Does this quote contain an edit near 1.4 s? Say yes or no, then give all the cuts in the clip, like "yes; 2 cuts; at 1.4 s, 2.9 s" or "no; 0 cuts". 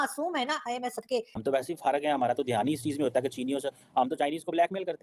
yes; 1 cut; at 1.4 s